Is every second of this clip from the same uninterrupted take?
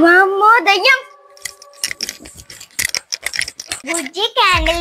yes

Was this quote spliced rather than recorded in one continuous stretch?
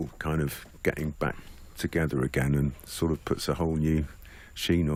no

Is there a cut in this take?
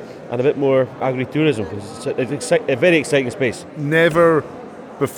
yes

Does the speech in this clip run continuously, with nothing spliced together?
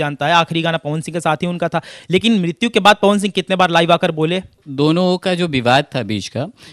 no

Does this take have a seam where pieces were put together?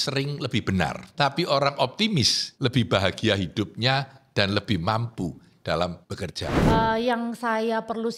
yes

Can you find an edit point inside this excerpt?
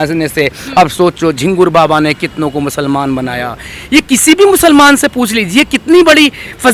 no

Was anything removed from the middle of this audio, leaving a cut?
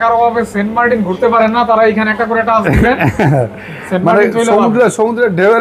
no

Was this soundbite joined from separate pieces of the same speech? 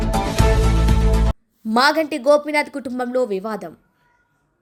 no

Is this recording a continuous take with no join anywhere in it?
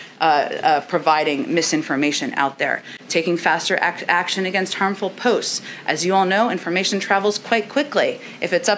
yes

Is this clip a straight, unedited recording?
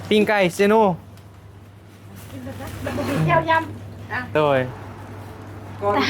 no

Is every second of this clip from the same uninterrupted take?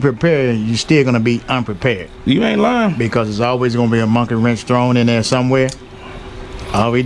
yes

